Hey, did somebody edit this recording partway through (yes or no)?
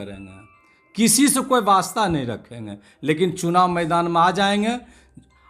no